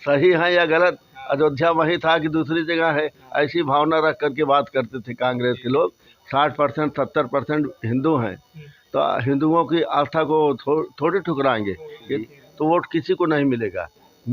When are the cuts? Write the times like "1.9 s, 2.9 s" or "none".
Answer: 6.1 s, 12.2 s